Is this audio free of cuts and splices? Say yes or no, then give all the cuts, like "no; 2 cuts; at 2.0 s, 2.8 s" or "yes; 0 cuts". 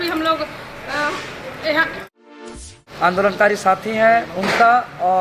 no; 1 cut; at 2.5 s